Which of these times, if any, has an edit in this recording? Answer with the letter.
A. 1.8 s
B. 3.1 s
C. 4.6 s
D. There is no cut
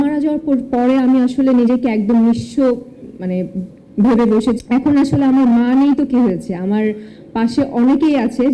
C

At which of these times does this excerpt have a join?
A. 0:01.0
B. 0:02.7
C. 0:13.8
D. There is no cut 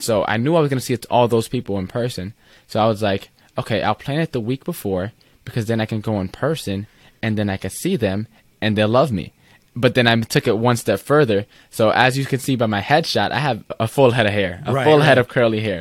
C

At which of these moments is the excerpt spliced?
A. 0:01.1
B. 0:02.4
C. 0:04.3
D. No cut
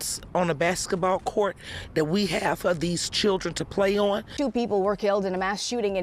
C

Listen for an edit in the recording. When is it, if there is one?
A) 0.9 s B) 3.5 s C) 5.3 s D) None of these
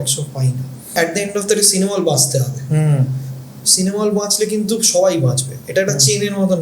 A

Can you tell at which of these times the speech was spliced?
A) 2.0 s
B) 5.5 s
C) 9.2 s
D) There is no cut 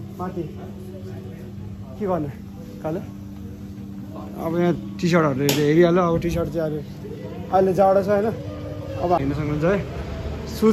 C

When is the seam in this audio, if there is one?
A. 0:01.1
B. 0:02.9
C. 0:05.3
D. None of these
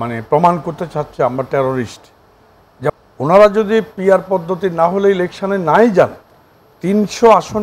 B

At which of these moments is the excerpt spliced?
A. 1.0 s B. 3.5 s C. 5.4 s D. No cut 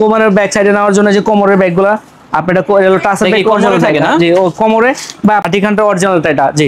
C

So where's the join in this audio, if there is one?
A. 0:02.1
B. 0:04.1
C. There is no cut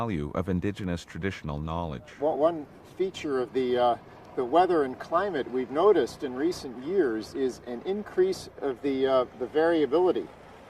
A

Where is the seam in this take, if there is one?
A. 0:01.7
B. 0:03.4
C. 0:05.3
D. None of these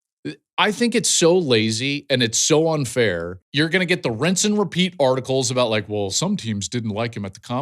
B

